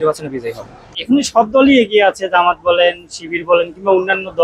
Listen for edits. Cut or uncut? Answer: cut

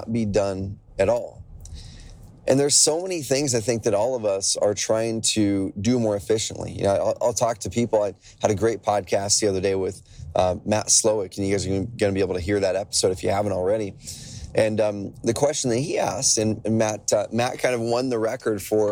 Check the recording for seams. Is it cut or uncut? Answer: uncut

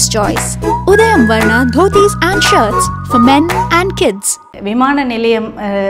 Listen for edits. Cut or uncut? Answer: cut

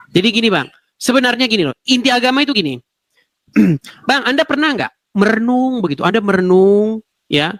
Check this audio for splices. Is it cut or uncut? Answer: uncut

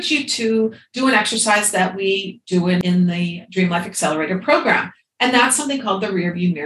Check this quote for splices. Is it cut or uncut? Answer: cut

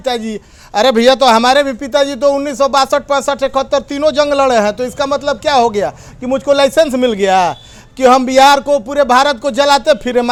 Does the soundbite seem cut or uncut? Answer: uncut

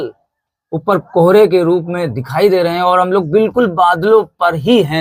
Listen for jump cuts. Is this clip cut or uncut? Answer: uncut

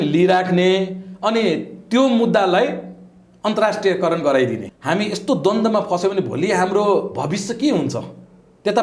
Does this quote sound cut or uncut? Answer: cut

